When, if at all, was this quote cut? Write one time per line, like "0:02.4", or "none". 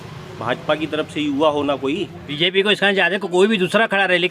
0:02.4